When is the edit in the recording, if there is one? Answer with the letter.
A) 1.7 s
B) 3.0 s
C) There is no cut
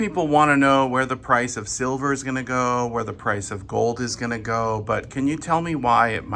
C